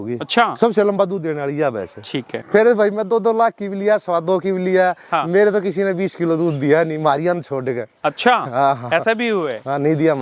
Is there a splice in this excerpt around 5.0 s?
no; 1 cut; at 2.4 s

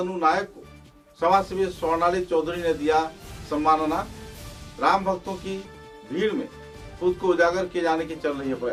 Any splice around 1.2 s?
no; 0 cuts

